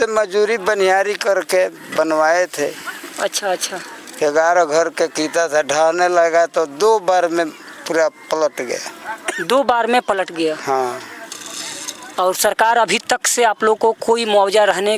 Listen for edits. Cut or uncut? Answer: uncut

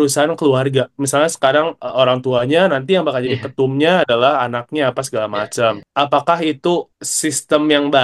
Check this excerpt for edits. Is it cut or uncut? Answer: cut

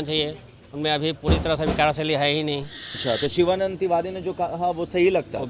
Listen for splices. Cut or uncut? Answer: cut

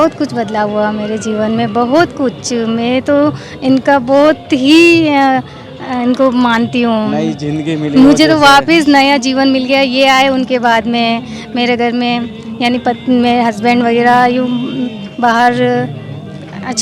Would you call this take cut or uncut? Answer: uncut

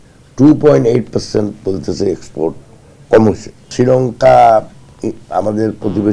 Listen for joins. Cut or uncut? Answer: cut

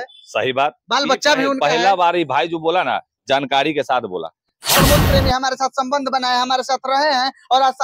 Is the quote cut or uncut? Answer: cut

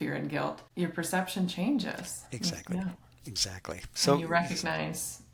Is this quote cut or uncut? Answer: uncut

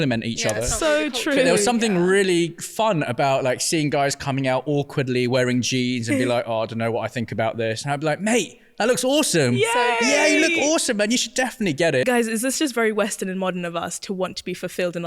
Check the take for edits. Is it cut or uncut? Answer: cut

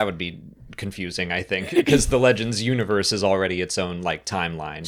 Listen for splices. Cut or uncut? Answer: uncut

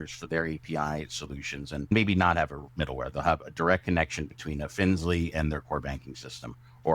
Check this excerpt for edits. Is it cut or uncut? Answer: cut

